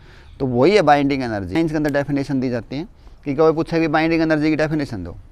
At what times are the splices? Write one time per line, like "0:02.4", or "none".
0:01.6